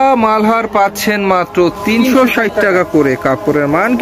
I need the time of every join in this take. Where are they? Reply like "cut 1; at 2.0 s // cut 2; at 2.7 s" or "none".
none